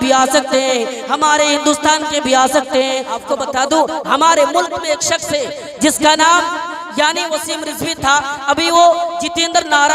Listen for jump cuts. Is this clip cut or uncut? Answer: cut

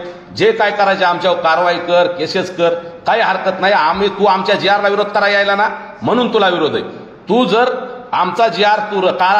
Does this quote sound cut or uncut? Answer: uncut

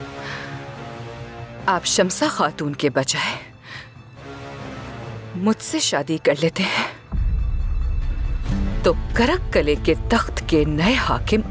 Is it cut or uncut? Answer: uncut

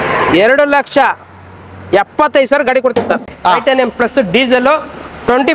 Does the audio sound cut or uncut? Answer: cut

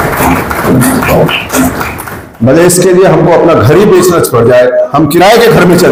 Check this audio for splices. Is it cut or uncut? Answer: uncut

